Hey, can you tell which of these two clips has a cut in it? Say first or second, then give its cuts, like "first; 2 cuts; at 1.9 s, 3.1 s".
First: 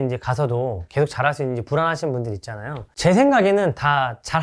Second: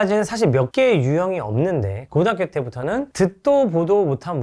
second; 1 cut; at 2.0 s